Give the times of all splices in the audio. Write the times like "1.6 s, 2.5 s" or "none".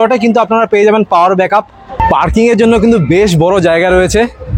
none